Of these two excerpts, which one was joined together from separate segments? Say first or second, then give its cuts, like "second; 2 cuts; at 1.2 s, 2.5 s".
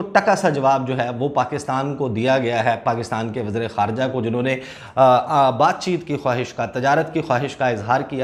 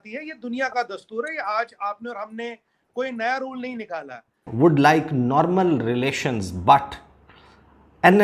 second; 1 cut; at 4.5 s